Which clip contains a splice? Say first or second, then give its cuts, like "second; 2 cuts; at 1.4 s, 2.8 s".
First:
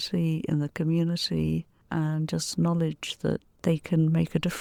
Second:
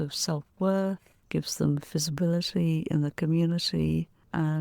second; 1 cut; at 1.1 s